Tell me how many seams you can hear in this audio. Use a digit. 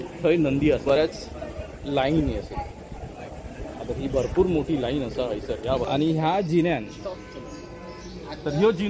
2